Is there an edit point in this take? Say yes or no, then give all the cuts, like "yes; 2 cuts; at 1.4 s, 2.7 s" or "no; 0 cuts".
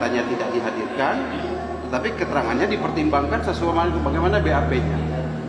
no; 0 cuts